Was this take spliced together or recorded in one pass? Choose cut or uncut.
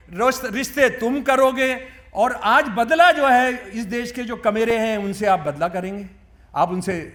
uncut